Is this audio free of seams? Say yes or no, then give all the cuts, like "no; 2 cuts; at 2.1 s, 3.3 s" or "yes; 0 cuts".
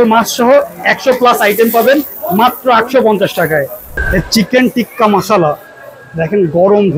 no; 1 cut; at 3.9 s